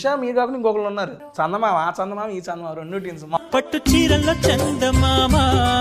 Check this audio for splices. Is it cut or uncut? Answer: cut